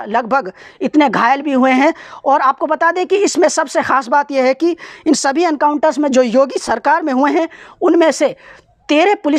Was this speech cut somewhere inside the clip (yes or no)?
no